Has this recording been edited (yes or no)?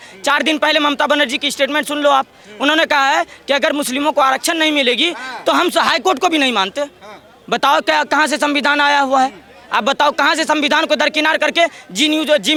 no